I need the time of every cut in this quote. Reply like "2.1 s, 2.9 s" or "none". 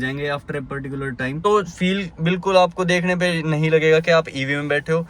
1.4 s